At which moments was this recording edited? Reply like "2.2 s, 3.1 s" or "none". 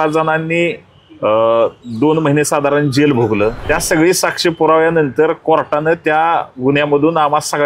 3.6 s